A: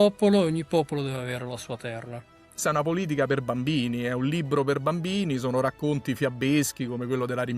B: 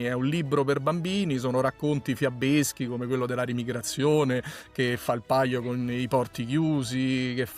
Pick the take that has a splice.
A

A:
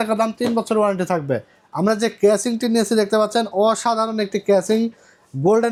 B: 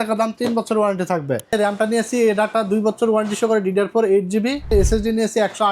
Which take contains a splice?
B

